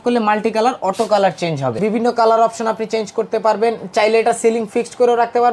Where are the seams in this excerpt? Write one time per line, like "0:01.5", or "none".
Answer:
0:01.8